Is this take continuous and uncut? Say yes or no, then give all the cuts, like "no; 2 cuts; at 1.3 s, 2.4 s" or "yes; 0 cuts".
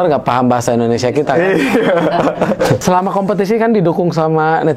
no; 1 cut; at 2.8 s